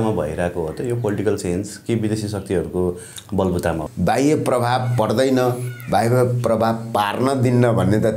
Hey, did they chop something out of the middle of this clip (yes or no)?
yes